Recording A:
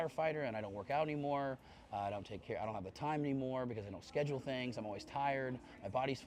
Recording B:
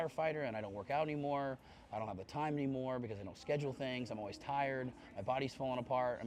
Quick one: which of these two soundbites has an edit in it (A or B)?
B